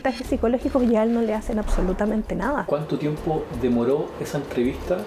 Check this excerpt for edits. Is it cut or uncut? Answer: cut